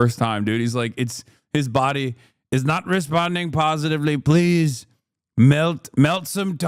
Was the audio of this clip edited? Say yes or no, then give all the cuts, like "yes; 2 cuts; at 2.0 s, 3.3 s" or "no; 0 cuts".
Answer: no; 0 cuts